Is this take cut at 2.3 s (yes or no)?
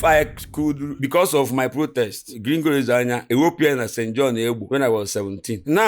yes